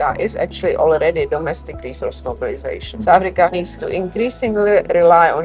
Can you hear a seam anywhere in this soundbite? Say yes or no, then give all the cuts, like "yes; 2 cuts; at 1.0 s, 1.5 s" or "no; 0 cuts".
no; 0 cuts